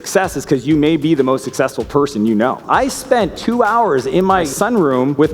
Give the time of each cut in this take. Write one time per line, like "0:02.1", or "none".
0:02.6
0:04.5